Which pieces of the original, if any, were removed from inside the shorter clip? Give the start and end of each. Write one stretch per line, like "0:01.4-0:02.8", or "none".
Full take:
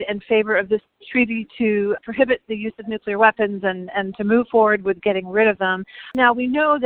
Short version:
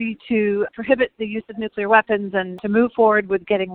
0:03.9-0:04.1